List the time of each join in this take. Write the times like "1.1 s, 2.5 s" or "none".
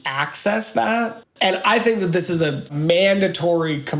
1.2 s, 2.7 s